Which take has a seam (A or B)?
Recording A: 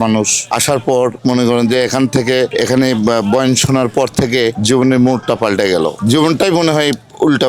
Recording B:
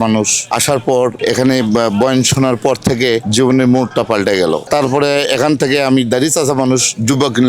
B